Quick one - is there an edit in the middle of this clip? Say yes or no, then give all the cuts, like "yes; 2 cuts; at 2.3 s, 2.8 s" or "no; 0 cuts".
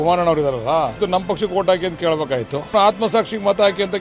yes; 2 cuts; at 1.0 s, 2.7 s